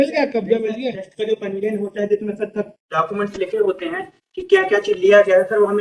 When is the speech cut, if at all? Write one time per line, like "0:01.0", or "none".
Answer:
none

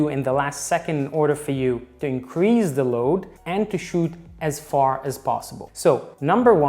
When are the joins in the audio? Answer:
0:05.6

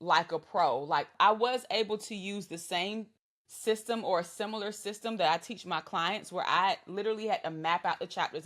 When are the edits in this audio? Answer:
0:01.1

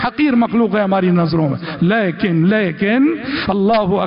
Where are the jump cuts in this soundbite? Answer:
none

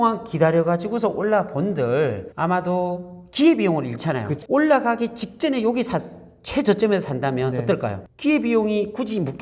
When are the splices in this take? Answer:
0:04.4

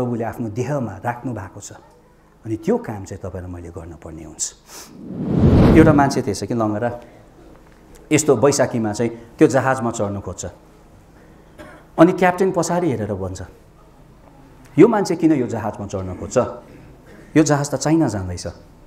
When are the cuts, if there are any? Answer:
0:05.3

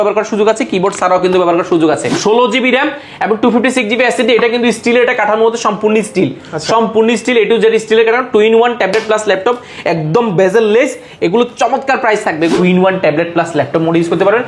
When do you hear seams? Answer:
0:02.1
0:12.5

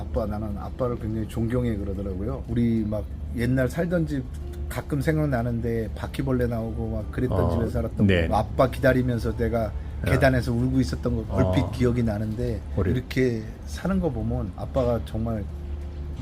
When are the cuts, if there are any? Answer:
0:02.4
0:08.3
0:11.3
0:13.0
0:14.6

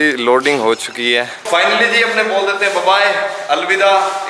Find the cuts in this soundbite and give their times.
0:01.3

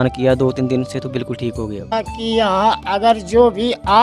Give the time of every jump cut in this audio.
0:01.8

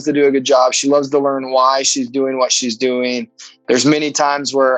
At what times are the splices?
none

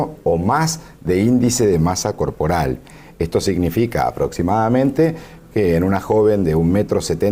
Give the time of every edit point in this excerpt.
none

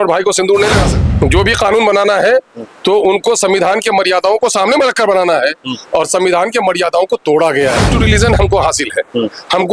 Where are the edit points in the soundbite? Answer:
0:00.9
0:07.9

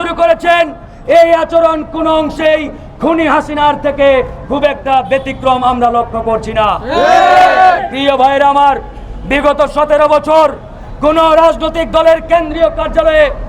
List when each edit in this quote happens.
none

